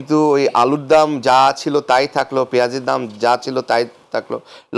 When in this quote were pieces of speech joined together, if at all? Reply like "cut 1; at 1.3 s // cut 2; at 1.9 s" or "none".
none